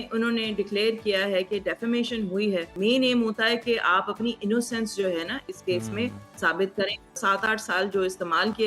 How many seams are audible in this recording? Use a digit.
2